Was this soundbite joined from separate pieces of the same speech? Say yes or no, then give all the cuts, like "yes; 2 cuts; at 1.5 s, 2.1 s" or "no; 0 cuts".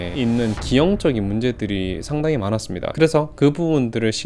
no; 0 cuts